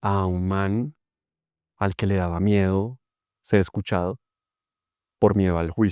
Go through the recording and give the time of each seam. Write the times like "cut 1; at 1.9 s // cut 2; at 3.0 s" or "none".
none

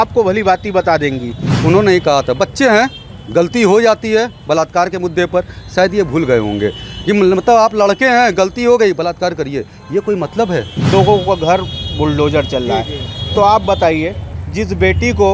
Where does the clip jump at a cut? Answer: cut 1; at 1.4 s // cut 2; at 10.9 s

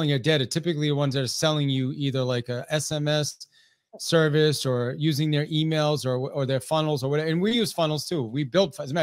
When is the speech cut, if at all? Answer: none

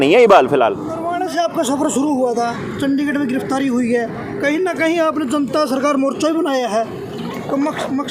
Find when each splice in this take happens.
cut 1; at 0.9 s

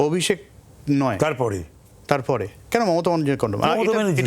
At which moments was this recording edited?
none

